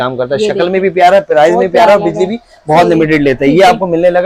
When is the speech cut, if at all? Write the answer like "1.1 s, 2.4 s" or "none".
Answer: none